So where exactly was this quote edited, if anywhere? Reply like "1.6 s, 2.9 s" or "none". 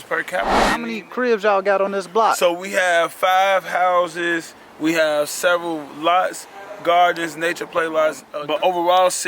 0.8 s, 8.3 s